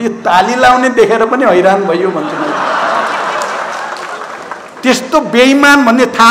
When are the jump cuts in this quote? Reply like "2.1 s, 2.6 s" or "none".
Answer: none